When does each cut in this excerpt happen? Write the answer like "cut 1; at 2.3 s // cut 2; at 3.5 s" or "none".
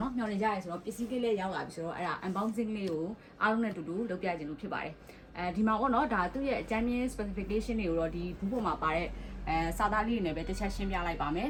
none